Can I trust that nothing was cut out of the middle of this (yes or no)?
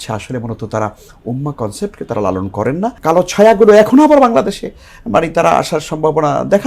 no